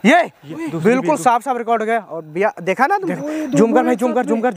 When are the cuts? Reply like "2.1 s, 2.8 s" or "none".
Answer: 3.1 s